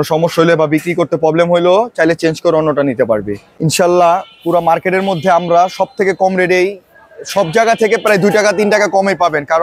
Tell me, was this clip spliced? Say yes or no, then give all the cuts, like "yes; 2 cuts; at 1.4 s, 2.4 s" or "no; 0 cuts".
yes; 1 cut; at 3.6 s